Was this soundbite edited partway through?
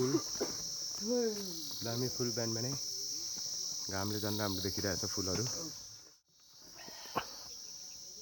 yes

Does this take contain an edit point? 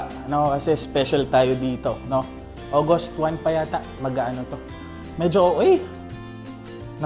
no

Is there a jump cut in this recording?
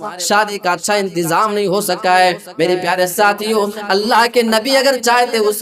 no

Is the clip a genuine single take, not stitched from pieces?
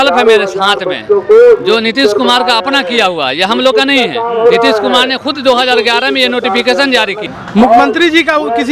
no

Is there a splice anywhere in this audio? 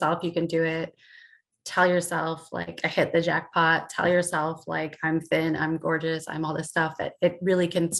no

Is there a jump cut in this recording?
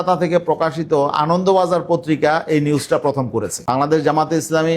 yes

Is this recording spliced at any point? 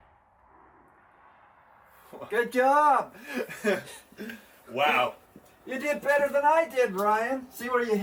no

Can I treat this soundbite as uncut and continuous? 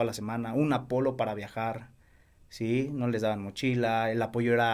yes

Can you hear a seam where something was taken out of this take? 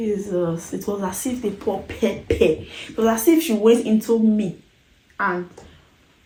no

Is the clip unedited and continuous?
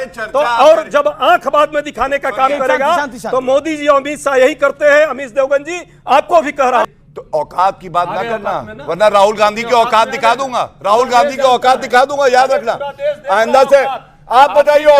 no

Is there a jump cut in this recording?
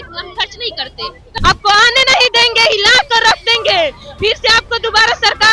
yes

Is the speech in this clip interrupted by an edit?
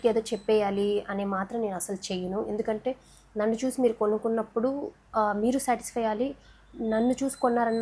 no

